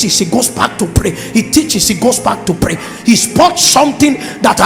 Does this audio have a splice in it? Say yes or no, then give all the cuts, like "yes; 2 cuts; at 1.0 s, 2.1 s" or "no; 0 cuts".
no; 0 cuts